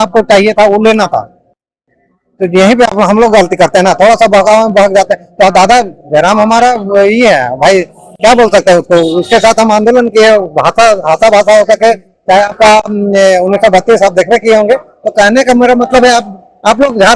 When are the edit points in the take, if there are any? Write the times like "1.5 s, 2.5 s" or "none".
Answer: none